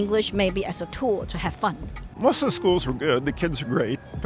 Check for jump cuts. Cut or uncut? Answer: cut